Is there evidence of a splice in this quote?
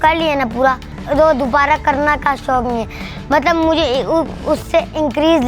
yes; 1 cut; at 0.9 s

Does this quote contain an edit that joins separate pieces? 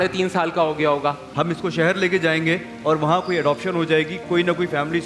yes; 1 cut; at 1.2 s

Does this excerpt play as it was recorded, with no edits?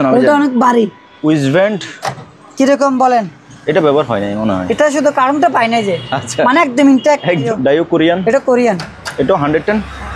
no; 2 cuts; at 1.1 s, 7.4 s

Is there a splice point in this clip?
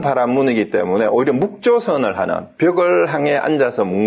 no; 0 cuts

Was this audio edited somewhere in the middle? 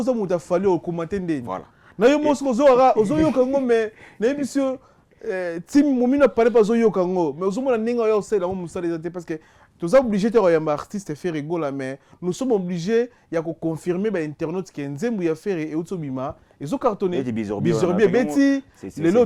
no; 0 cuts

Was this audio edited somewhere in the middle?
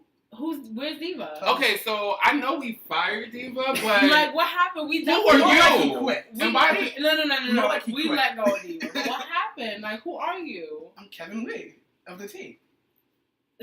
yes; 1 cut; at 10.9 s

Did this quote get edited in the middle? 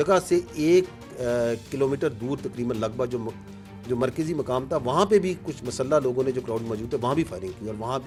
no; 0 cuts

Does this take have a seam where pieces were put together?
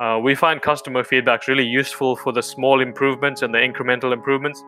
no; 0 cuts

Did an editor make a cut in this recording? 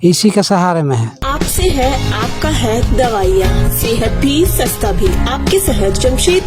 yes; 1 cut; at 1.2 s

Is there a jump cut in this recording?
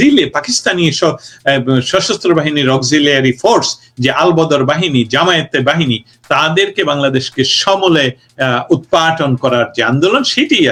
no; 0 cuts

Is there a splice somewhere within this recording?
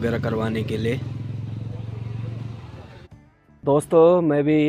yes; 1 cut; at 3.2 s

